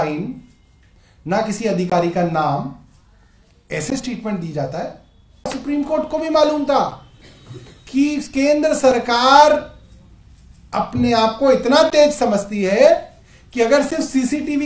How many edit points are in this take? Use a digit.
1